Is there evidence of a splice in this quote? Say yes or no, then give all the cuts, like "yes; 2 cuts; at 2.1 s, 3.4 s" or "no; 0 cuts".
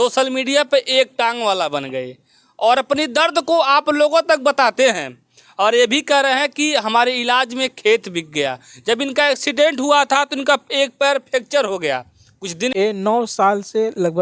yes; 1 cut; at 12.7 s